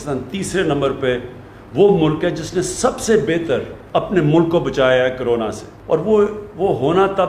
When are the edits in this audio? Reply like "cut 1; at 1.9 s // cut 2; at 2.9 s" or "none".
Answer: cut 1; at 3.8 s // cut 2; at 5.7 s